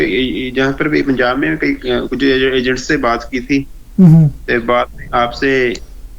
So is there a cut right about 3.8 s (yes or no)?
no